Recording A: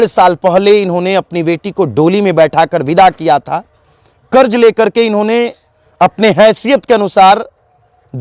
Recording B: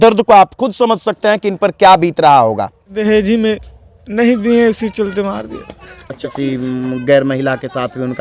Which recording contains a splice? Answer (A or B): B